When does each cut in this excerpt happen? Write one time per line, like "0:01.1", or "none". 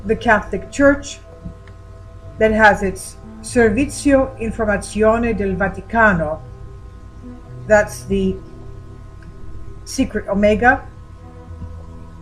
0:08.5

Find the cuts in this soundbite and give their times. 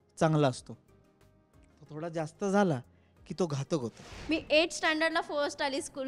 0:04.1

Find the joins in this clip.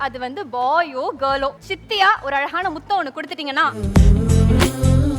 0:01.7
0:03.8

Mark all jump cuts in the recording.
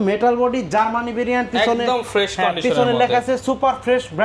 none

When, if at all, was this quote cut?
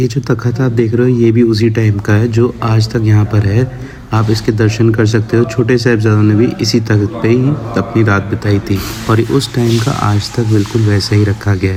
none

